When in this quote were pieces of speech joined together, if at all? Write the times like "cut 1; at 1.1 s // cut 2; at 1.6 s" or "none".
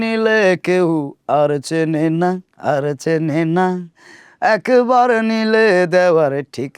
none